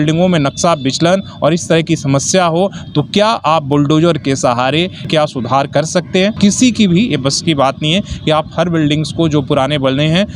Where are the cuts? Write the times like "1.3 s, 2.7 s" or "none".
5.0 s, 6.4 s